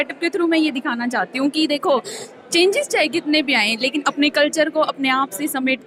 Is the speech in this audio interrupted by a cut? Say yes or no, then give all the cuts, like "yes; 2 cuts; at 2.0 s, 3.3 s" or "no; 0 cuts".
no; 0 cuts